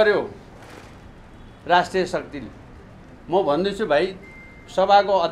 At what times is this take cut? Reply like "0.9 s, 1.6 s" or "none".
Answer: none